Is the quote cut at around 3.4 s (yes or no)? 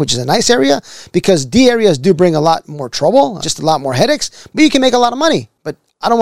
yes